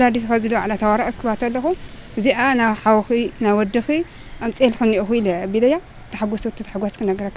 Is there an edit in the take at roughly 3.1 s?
no; 0 cuts

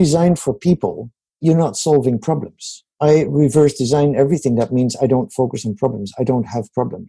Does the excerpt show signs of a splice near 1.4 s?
yes; 2 cuts; at 1.4 s, 2.9 s

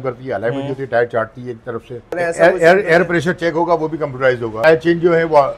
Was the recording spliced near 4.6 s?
yes; 2 cuts; at 2.2 s, 4.6 s

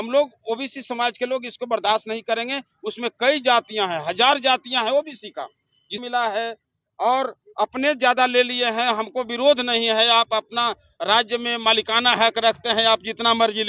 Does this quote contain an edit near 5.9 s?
yes; 1 cut; at 5.9 s

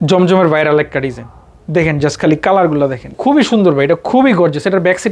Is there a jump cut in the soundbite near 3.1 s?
yes; 1 cut; at 3.1 s

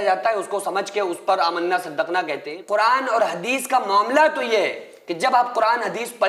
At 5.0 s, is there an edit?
no; 1 cut; at 2.5 s

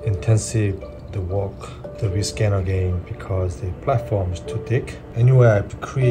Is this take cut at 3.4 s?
no; 3 cuts; at 1.0 s, 1.8 s, 5.0 s

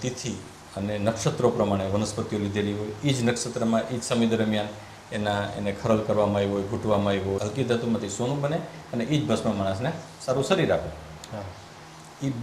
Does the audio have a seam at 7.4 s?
yes; 1 cut; at 7.4 s

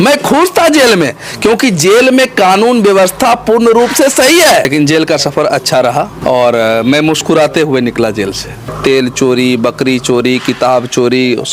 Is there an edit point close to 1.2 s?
no; 3 cuts; at 4.7 s, 6.1 s, 8.7 s

